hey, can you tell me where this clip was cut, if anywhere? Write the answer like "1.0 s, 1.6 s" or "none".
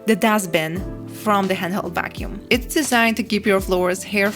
2.4 s